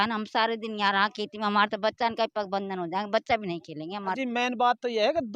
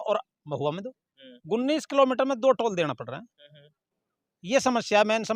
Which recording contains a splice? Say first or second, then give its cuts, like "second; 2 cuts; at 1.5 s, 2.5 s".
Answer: first; 1 cut; at 4.2 s